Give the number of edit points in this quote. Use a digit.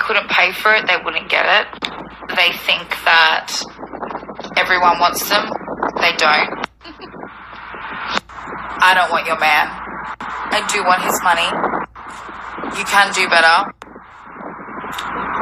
0